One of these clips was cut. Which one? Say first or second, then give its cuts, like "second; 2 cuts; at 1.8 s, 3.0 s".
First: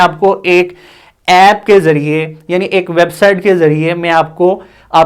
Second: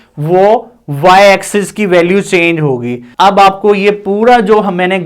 second; 1 cut; at 3.1 s